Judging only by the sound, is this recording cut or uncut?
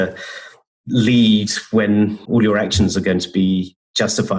cut